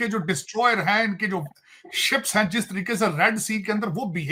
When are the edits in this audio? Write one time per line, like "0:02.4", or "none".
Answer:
none